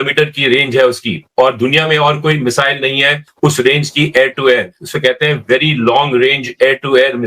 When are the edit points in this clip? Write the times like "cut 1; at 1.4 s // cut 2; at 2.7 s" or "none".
none